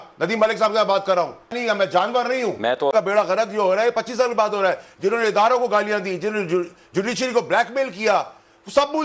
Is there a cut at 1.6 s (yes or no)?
yes